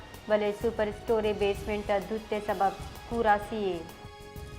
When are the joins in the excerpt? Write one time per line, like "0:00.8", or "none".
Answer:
0:03.6